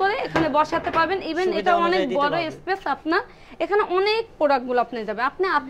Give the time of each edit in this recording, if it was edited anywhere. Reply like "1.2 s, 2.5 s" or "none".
none